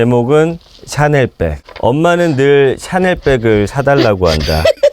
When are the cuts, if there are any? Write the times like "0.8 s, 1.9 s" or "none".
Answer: 1.6 s